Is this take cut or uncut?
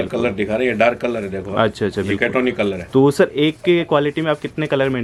uncut